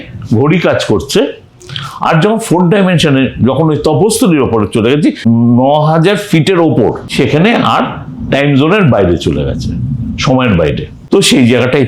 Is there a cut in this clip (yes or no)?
yes